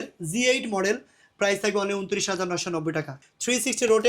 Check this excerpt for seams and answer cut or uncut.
cut